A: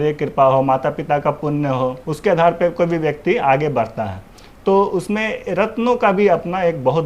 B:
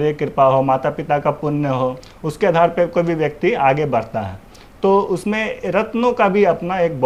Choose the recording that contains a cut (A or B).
A